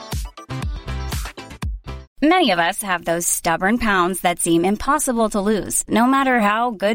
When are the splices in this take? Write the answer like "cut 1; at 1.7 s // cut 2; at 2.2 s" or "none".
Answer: cut 1; at 2.0 s